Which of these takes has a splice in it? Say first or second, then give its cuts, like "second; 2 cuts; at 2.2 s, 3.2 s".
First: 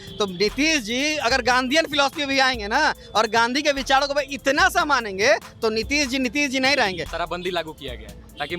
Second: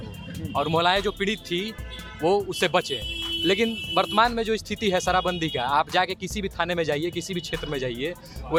first; 1 cut; at 7.1 s